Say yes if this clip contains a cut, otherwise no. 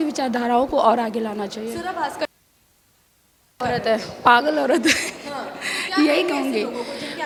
no